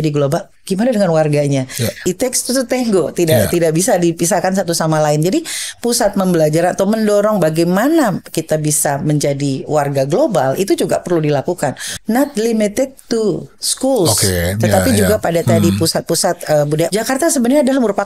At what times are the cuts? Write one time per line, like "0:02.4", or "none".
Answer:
0:02.1
0:11.9
0:16.9